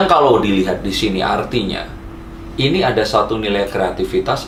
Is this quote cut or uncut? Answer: uncut